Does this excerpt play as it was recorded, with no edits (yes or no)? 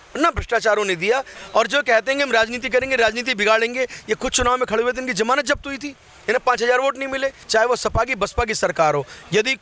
no